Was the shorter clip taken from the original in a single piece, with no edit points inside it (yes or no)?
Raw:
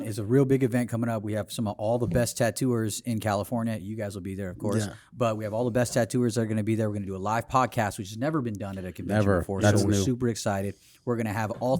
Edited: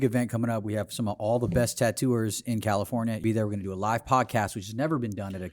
no